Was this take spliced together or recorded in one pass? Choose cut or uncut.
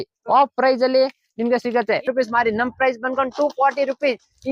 cut